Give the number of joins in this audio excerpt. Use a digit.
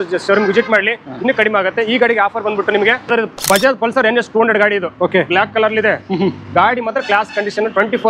1